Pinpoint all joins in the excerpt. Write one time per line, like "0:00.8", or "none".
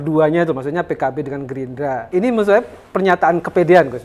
0:02.1